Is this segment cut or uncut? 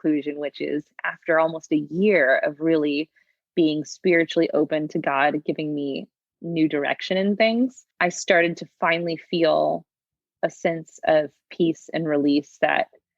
cut